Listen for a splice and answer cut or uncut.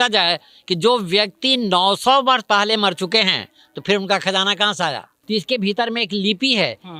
cut